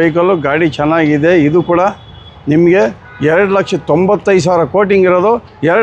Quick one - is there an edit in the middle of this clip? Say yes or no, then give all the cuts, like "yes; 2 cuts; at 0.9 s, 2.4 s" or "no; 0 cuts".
no; 0 cuts